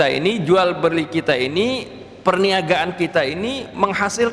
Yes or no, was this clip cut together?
no